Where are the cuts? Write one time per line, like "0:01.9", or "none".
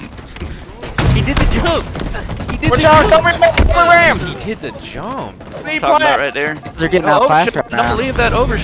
0:05.6